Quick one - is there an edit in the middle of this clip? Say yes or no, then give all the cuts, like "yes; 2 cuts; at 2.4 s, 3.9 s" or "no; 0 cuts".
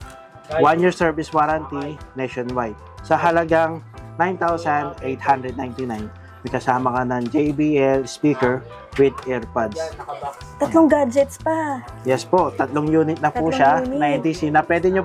no; 0 cuts